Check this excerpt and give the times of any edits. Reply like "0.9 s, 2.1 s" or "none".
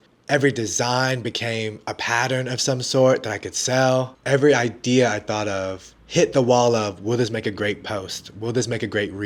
none